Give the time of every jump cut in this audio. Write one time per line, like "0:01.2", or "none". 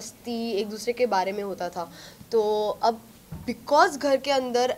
none